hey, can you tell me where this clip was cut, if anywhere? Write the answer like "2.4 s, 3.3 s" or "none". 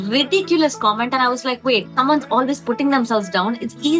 1.9 s